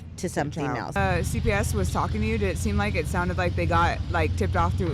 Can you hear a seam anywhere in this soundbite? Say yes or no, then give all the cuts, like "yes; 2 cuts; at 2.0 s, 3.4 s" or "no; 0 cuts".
yes; 1 cut; at 1.0 s